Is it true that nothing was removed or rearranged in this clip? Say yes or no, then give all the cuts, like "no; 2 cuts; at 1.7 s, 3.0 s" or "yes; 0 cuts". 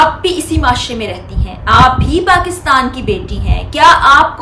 yes; 0 cuts